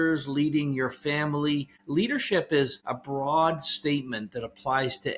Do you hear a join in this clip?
yes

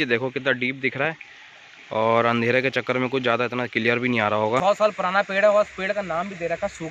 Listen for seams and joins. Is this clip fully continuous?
no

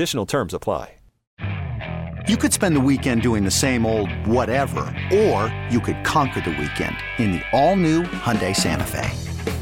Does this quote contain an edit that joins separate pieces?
yes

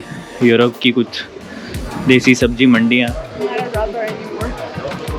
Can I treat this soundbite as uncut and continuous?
yes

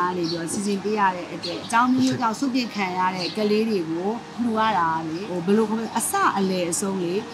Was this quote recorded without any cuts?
no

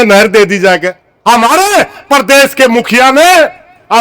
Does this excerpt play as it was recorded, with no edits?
no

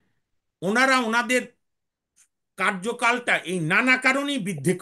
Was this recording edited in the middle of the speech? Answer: no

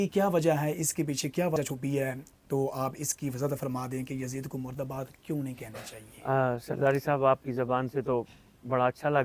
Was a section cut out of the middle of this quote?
yes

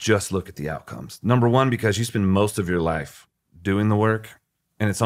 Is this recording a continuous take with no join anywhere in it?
yes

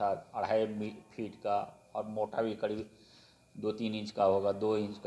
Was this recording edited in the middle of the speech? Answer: no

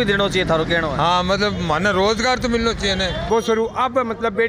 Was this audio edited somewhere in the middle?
yes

